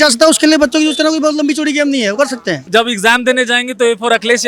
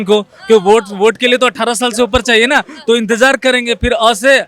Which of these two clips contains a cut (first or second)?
first